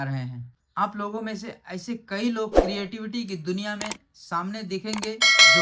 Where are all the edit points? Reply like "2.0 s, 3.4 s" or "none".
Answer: none